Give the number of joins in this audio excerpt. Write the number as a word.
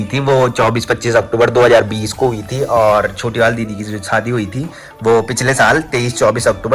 zero